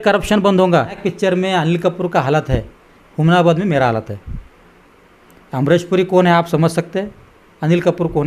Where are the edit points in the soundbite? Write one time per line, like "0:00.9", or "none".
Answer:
0:01.1